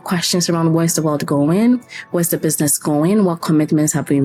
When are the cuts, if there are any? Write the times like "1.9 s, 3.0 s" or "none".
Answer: none